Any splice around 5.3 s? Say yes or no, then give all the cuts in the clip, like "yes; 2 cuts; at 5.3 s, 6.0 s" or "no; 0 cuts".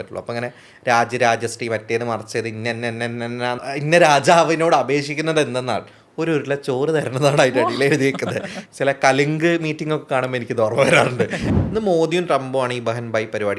no; 3 cuts; at 3.6 s, 8.6 s, 11.4 s